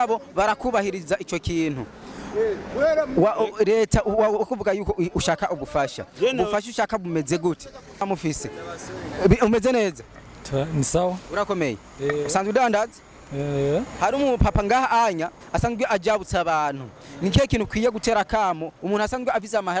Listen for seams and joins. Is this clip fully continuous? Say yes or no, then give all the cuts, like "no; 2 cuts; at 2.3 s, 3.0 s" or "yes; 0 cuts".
no; 1 cut; at 8.0 s